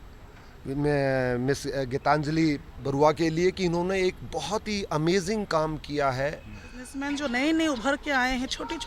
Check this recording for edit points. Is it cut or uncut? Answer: cut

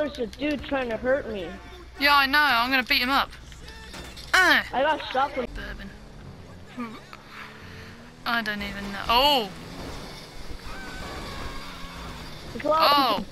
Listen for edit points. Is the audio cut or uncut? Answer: cut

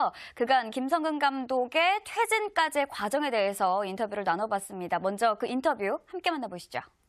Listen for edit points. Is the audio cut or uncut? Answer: cut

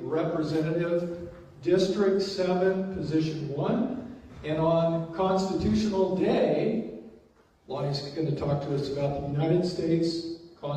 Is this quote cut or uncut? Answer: cut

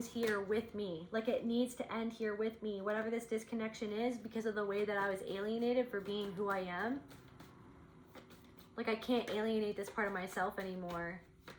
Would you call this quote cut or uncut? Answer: uncut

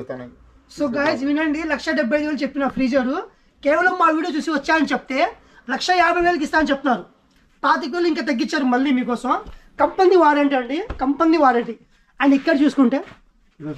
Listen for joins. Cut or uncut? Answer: uncut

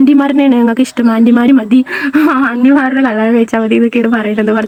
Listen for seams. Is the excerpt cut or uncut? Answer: uncut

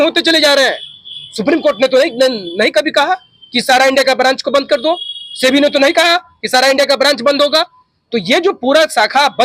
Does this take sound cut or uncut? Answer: uncut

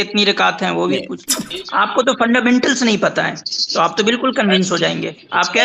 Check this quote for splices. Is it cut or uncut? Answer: cut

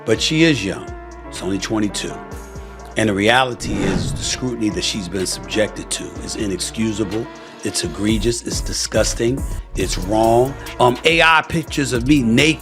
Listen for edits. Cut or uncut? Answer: cut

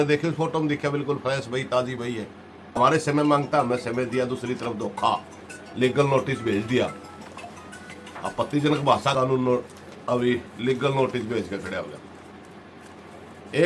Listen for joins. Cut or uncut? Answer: cut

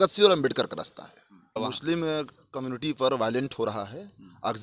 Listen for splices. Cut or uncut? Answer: cut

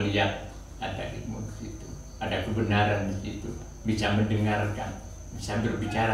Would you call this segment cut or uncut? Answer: uncut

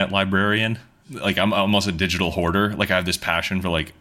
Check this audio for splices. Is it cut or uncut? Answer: cut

